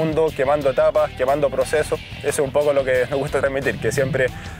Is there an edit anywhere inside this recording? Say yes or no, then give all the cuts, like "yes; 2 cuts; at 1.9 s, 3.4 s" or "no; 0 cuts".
yes; 1 cut; at 2.1 s